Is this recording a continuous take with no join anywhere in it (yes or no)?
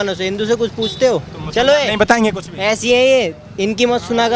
yes